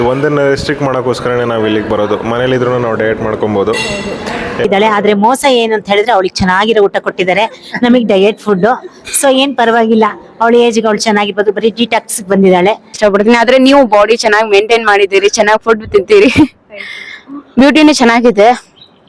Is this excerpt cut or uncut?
cut